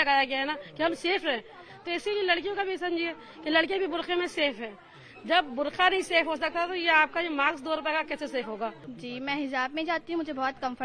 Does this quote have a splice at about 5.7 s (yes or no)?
no